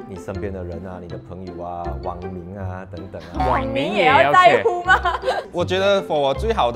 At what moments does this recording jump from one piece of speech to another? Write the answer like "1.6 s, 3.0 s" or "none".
5.4 s